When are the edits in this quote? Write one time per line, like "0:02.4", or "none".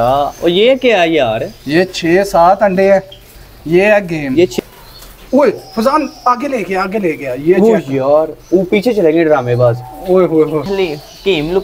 0:04.5
0:10.7